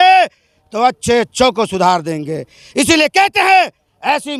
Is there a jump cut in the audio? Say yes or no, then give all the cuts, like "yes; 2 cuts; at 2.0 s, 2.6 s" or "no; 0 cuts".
no; 0 cuts